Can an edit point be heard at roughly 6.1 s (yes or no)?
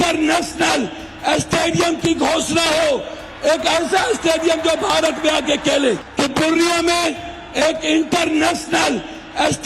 yes